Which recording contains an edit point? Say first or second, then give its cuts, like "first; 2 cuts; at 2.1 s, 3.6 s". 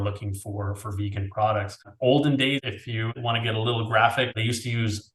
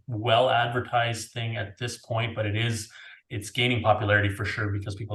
first; 3 cuts; at 1.9 s, 3.2 s, 4.4 s